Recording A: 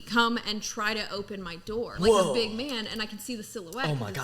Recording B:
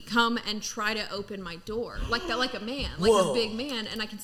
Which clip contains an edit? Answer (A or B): A